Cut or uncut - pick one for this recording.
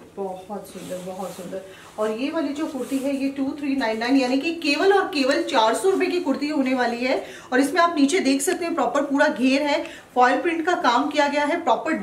uncut